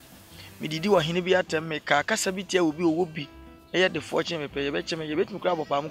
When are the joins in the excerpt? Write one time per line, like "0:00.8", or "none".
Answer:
none